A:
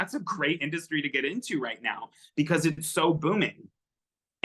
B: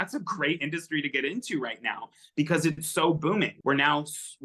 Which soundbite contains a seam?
B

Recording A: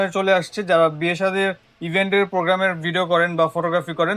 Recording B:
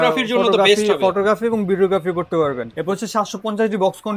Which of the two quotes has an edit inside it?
B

